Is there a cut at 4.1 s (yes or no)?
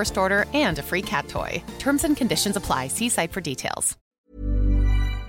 yes